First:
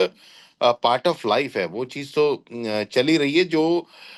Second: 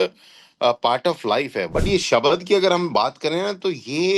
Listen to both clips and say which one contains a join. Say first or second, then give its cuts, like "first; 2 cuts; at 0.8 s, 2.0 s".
second; 1 cut; at 1.7 s